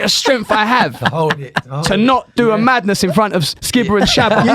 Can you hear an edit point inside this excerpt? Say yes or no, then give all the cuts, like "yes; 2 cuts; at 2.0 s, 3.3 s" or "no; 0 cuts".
no; 0 cuts